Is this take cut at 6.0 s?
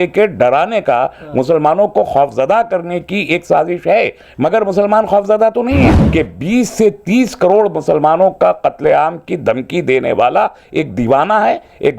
yes; 1 cut; at 6.0 s

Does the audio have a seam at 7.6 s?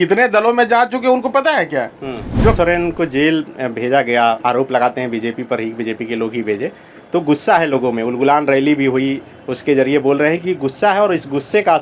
no; 1 cut; at 2.6 s

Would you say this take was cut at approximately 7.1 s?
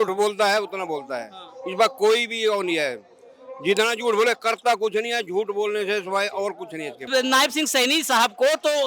yes; 1 cut; at 7.1 s

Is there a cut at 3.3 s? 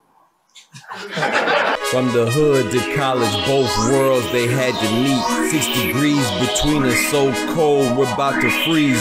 no; 1 cut; at 1.8 s

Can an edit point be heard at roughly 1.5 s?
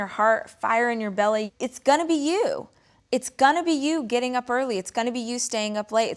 yes; 1 cut; at 1.5 s

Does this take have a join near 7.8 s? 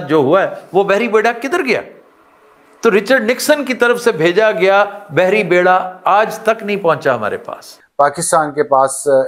yes; 1 cut; at 7.8 s

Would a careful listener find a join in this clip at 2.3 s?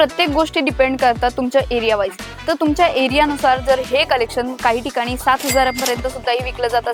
no; 0 cuts

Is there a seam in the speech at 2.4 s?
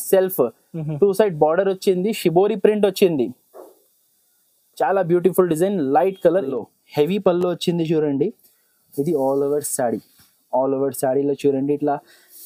no; 1 cut; at 6.5 s

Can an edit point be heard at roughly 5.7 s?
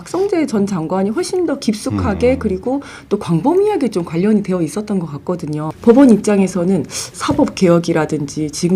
yes; 1 cut; at 5.7 s

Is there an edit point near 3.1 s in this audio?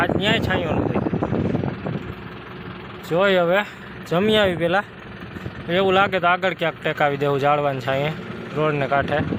no; 0 cuts

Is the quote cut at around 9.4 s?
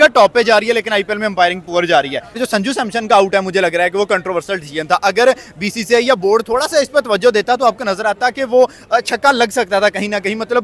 no; 1 cut; at 2.2 s

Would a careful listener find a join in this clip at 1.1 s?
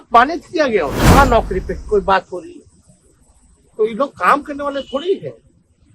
yes; 1 cut; at 1.1 s

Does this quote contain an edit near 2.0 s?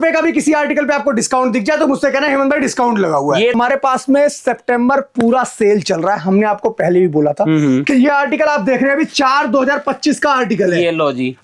no; 2 cuts; at 3.5 s, 7.9 s

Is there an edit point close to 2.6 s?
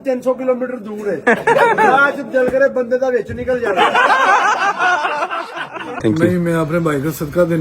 no; 2 cuts; at 4.0 s, 6.0 s

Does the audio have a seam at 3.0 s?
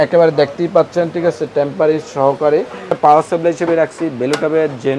yes; 1 cut; at 3.0 s

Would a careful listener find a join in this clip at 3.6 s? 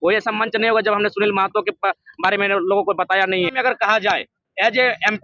yes; 1 cut; at 3.6 s

